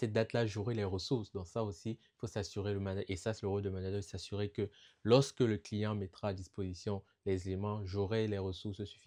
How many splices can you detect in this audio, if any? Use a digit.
0